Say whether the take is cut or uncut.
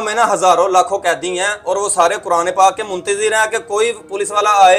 uncut